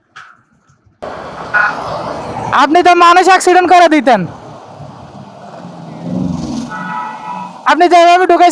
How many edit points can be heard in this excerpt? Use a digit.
1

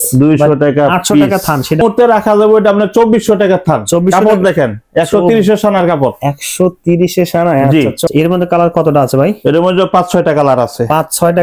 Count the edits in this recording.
2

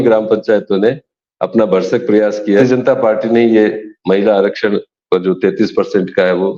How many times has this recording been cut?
1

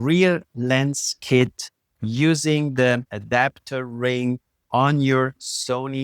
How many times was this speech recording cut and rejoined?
1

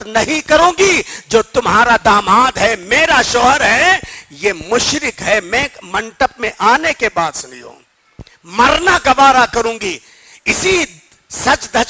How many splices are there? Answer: 0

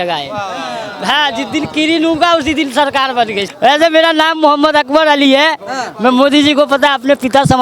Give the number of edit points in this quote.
1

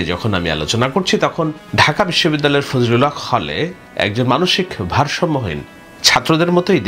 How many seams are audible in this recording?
0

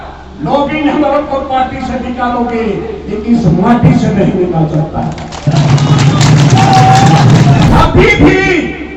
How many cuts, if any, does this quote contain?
1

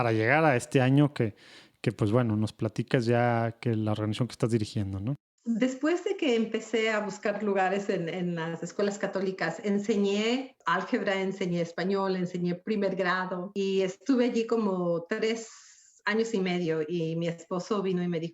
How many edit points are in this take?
3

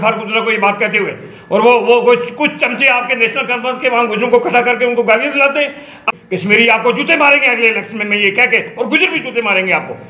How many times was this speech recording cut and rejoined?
1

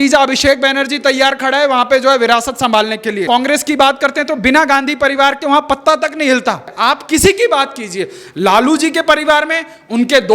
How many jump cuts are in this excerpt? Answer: 2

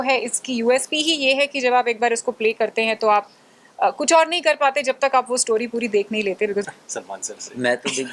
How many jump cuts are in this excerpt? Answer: 1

